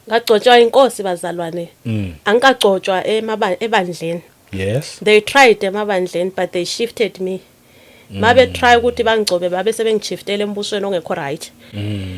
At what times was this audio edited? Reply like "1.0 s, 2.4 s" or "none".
none